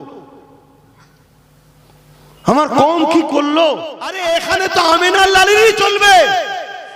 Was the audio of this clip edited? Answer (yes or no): yes